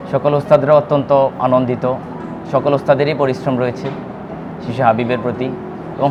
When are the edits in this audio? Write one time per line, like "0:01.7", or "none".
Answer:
none